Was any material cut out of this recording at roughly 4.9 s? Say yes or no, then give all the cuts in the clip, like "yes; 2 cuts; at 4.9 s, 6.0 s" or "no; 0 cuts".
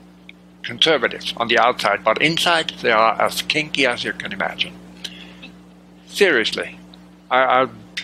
no; 0 cuts